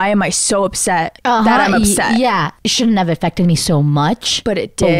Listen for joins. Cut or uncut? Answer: cut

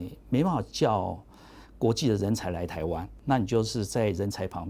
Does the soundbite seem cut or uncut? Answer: cut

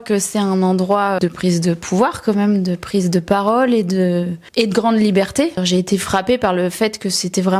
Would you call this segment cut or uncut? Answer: cut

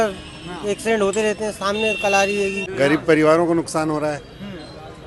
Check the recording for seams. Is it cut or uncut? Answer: cut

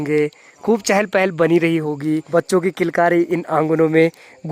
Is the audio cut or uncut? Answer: cut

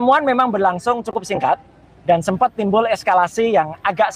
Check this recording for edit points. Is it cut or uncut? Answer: uncut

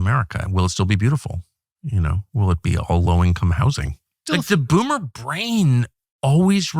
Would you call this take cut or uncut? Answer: cut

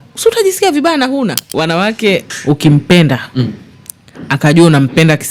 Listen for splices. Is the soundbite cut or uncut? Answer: cut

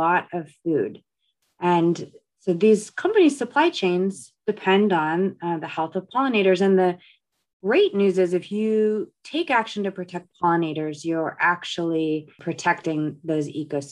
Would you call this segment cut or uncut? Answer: cut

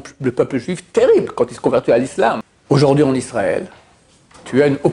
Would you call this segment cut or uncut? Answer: cut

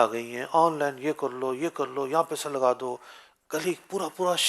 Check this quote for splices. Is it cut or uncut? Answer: uncut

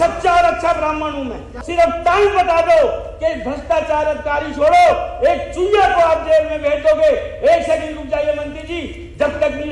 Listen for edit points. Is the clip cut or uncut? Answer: cut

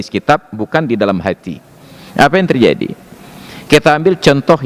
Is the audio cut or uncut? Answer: uncut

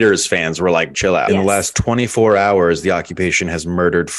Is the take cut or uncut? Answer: cut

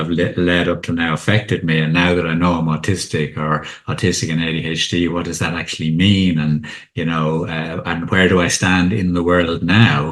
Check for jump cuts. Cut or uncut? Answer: uncut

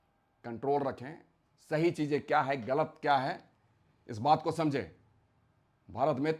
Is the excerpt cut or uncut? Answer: uncut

